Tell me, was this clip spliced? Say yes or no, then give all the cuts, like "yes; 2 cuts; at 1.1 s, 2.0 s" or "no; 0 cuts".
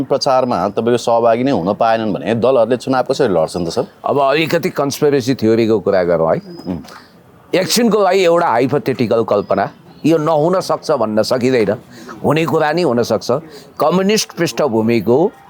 no; 0 cuts